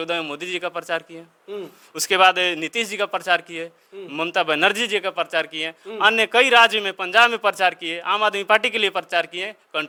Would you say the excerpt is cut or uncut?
uncut